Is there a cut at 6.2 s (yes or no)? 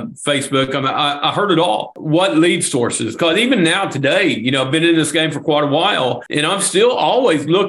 yes